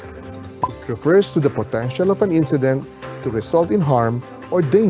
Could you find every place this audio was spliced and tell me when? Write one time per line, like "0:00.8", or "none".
none